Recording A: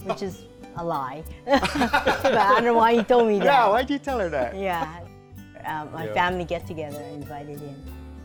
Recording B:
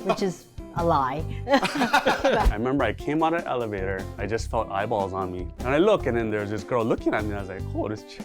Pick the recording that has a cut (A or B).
B